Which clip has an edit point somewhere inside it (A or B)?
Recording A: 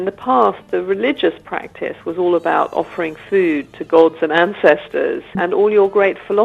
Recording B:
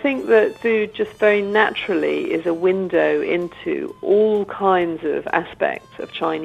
A